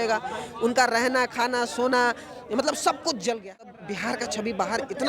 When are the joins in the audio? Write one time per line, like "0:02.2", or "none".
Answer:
0:03.7